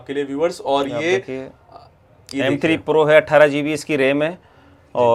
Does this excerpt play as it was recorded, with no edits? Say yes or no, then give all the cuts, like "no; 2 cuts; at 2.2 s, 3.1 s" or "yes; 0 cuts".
yes; 0 cuts